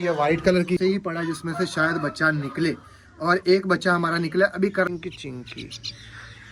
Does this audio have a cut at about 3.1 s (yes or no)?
no